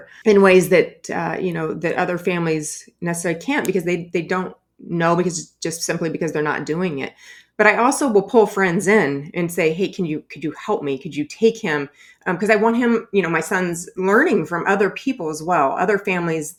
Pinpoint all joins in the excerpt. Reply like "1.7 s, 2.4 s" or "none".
none